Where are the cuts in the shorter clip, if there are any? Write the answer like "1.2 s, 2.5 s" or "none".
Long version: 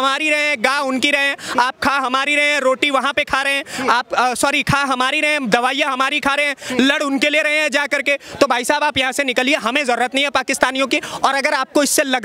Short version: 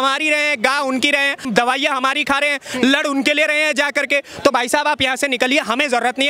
1.4 s

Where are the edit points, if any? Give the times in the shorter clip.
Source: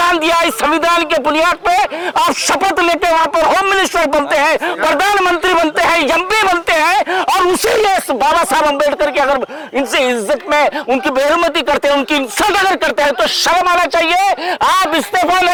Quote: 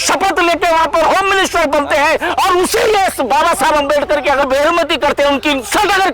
2.3 s, 4.4 s

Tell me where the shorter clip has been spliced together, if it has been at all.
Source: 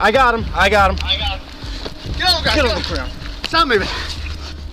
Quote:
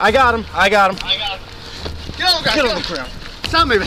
none

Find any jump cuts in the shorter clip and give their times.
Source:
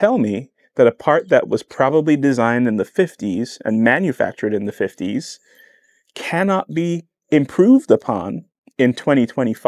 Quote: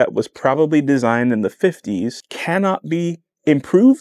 2.2 s

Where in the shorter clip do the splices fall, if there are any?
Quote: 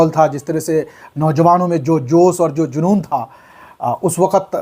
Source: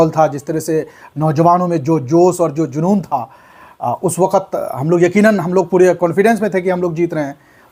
none

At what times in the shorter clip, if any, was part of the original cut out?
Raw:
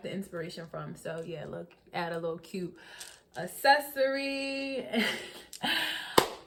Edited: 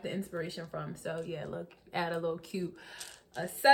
none

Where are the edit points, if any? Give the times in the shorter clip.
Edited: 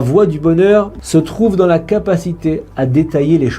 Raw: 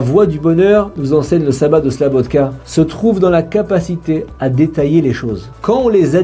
1.0 s

